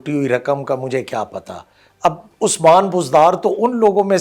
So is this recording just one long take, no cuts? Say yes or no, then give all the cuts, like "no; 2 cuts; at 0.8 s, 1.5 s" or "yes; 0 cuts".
yes; 0 cuts